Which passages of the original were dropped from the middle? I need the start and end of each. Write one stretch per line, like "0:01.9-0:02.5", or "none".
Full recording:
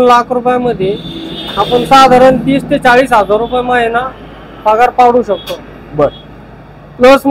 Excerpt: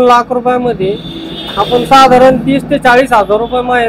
none